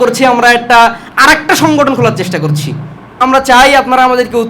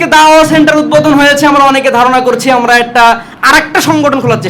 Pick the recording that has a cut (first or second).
first